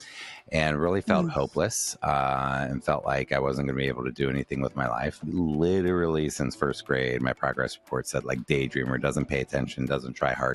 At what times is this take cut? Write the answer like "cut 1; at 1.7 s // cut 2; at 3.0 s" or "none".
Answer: none